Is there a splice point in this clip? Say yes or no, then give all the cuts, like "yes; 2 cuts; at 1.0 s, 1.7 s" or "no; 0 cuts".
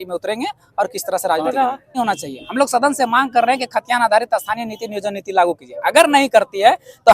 yes; 1 cut; at 2.0 s